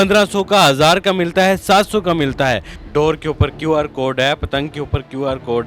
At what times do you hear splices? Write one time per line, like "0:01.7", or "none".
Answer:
0:02.7